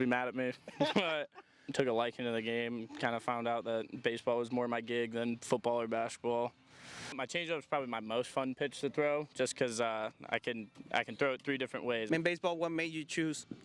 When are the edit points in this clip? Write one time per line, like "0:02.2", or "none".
0:01.5
0:07.2
0:12.0